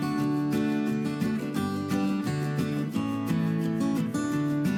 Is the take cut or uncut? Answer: uncut